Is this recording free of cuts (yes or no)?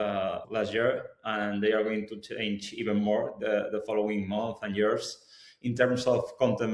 yes